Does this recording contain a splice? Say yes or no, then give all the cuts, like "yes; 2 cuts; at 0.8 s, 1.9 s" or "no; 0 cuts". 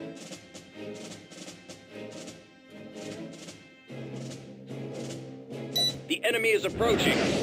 yes; 1 cut; at 2.5 s